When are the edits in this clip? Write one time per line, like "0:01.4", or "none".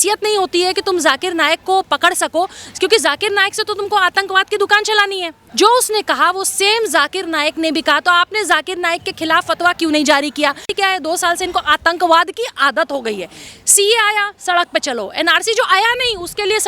0:05.4
0:10.7